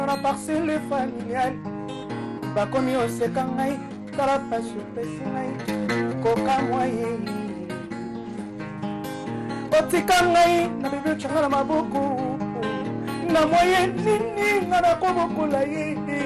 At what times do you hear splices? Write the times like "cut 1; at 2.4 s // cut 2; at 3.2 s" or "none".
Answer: none